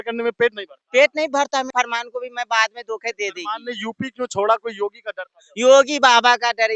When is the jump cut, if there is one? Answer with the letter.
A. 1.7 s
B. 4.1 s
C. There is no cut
A